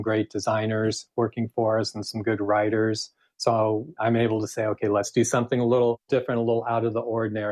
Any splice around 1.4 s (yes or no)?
no